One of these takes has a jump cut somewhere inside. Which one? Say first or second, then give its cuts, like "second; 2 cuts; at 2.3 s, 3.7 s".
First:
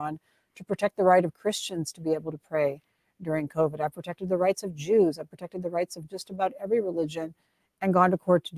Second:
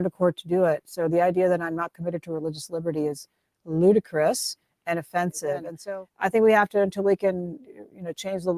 second; 1 cut; at 5.7 s